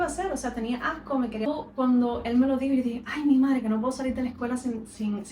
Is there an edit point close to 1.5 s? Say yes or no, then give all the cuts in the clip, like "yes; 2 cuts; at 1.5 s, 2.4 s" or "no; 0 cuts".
yes; 1 cut; at 1.5 s